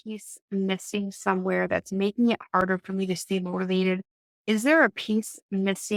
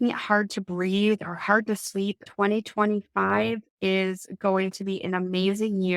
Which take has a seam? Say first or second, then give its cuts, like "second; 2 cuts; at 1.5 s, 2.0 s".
second; 1 cut; at 2.2 s